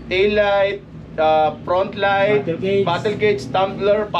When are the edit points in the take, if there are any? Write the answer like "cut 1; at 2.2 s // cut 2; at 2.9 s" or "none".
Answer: none